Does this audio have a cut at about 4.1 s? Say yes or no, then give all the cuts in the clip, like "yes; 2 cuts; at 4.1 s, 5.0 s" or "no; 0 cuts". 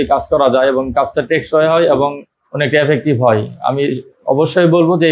no; 0 cuts